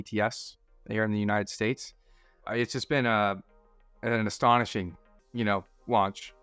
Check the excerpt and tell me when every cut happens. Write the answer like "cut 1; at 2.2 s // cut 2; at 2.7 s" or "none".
cut 1; at 2.5 s